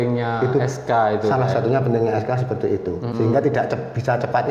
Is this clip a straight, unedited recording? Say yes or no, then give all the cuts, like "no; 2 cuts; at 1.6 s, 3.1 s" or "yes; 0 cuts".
no; 1 cut; at 3.1 s